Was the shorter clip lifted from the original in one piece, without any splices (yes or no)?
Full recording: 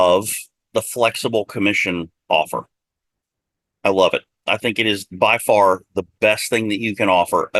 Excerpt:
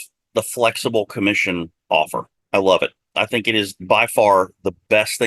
no